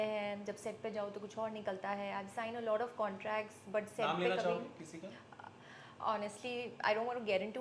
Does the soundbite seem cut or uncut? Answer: uncut